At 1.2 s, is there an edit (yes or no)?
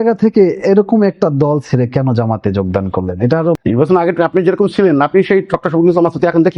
no